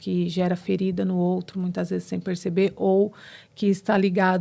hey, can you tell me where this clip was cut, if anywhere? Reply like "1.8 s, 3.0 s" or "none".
none